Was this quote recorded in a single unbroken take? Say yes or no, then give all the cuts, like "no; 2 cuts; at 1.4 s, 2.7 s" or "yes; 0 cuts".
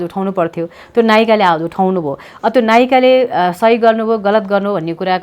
yes; 0 cuts